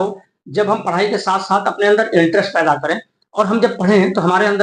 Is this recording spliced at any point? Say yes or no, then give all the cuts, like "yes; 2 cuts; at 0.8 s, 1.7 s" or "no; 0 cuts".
no; 0 cuts